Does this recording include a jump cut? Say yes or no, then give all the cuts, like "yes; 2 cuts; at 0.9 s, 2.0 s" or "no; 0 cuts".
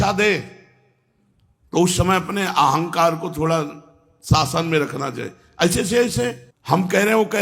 yes; 1 cut; at 6.5 s